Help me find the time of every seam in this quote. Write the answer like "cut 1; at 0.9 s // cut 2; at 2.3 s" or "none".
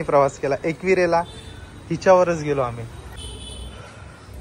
none